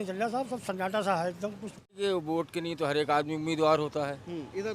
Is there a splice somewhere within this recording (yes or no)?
yes